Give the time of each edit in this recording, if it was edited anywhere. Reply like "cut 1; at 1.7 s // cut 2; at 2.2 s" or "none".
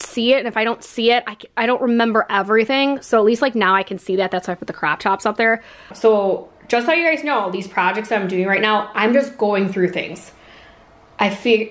cut 1; at 5.8 s